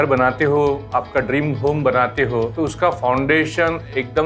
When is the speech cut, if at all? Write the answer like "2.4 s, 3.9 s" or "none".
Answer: 2.5 s